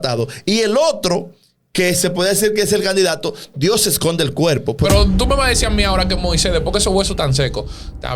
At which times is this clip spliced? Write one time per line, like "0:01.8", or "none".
0:04.9